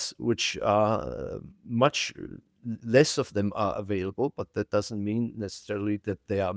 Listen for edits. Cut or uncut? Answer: uncut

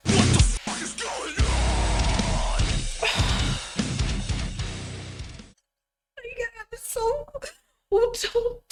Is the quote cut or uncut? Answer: uncut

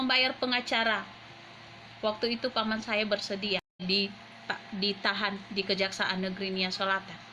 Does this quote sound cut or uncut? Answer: cut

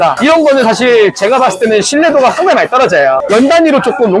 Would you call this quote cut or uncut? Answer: cut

